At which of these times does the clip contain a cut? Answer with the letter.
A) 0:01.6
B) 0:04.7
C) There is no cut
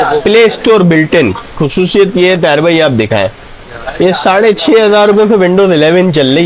A